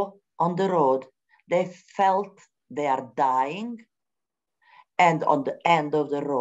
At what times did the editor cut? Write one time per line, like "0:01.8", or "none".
none